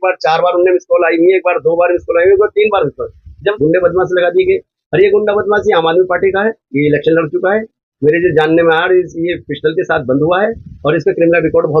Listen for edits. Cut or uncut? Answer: cut